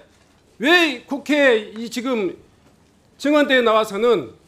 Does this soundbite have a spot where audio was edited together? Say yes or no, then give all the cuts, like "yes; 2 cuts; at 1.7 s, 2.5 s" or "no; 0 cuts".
no; 0 cuts